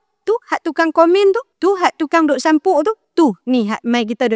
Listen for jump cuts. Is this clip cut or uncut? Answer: cut